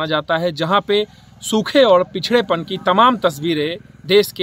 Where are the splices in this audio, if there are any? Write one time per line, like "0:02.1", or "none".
none